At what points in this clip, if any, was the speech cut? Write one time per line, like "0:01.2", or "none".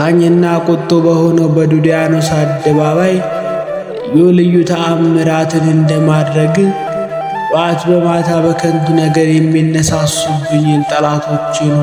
none